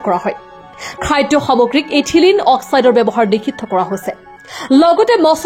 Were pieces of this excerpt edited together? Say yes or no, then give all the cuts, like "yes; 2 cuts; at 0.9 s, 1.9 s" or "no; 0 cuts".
no; 0 cuts